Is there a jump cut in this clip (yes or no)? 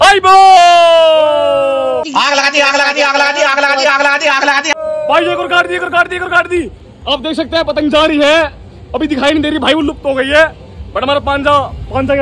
no